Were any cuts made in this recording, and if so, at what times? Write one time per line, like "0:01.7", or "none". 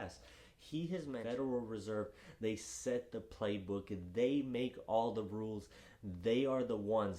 0:01.2